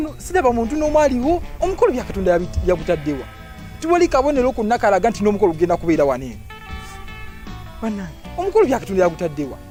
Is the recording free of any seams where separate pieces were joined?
yes; 0 cuts

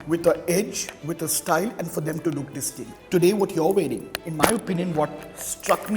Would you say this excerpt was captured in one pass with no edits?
no; 1 cut; at 2.8 s

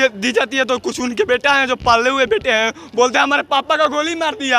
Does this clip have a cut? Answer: no; 0 cuts

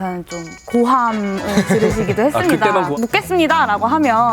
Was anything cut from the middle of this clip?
yes; 1 cut; at 2.9 s

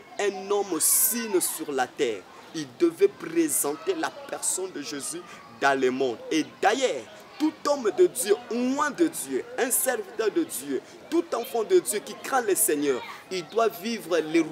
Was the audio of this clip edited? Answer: no; 0 cuts

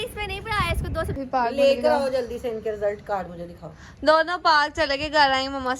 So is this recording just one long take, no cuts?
no; 1 cut; at 1.1 s

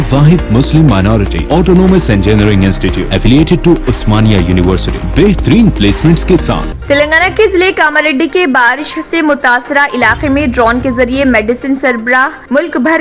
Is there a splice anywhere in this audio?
yes; 1 cut; at 6.7 s

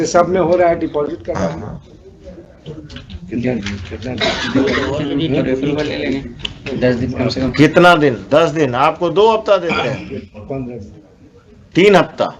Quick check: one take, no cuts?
yes; 0 cuts

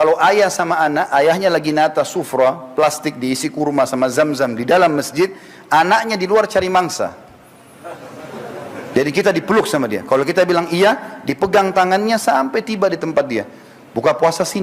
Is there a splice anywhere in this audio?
no; 0 cuts

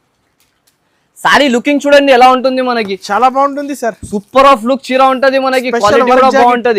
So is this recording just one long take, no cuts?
yes; 0 cuts

